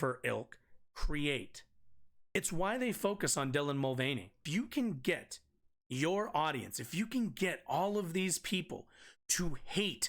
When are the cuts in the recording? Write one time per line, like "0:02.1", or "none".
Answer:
0:02.4
0:04.4